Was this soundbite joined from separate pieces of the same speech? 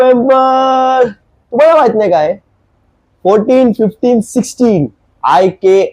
no; 0 cuts

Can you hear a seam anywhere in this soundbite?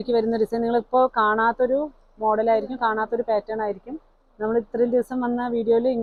no; 0 cuts

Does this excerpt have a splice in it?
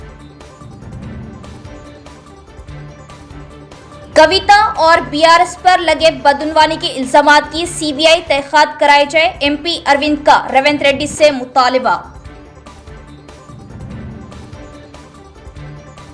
no; 0 cuts

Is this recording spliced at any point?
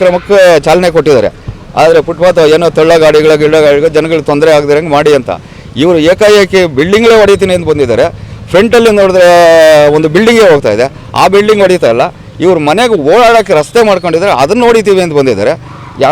no; 0 cuts

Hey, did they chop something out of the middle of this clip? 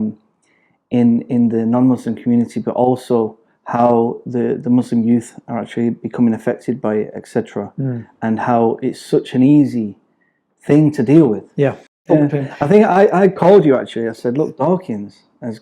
yes; 1 cut; at 12.0 s

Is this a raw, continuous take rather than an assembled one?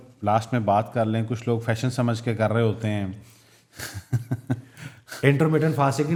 yes; 0 cuts

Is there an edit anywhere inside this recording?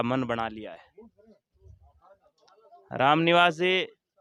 no; 0 cuts

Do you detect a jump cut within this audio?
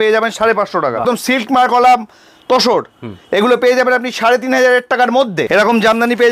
yes; 2 cuts; at 1.0 s, 5.5 s

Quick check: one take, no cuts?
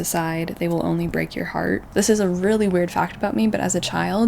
no; 1 cut; at 1.9 s

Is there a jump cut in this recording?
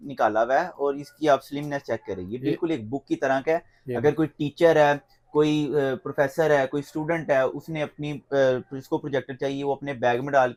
no; 0 cuts

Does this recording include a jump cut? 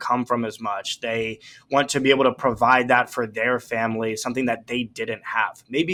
no; 0 cuts

